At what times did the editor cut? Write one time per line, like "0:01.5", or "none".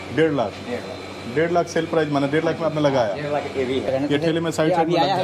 0:03.9